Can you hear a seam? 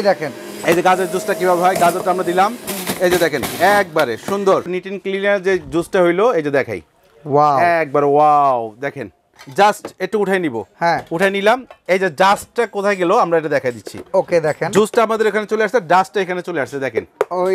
yes; 2 cuts; at 4.7 s, 9.4 s

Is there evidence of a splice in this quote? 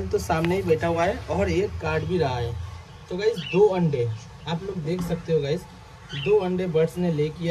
no; 0 cuts

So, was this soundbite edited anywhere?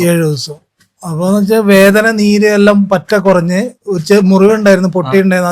no; 0 cuts

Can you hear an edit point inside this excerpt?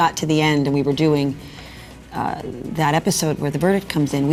no; 0 cuts

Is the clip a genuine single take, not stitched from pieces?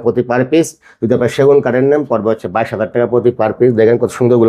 yes; 0 cuts

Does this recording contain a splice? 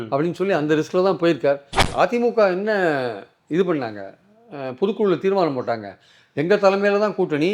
yes; 1 cut; at 1.8 s

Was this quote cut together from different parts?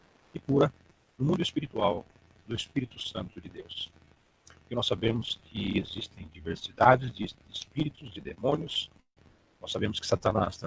no; 0 cuts

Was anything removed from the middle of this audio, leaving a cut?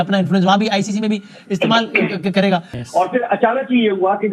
yes; 1 cut; at 2.8 s

